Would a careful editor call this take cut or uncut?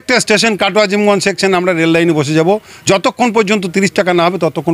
uncut